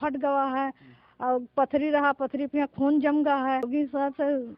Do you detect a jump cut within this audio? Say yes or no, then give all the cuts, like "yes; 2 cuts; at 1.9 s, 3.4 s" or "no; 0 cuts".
yes; 1 cut; at 3.7 s